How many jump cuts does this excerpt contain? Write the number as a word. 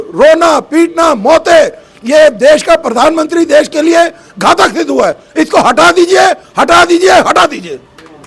zero